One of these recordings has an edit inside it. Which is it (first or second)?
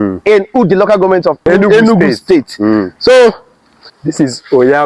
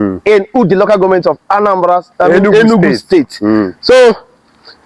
first